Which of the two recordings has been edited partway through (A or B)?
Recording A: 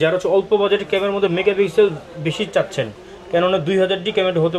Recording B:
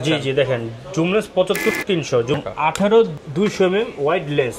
B